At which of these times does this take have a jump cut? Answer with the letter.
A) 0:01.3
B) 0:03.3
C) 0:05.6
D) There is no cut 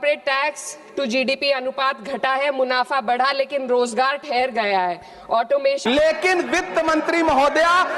C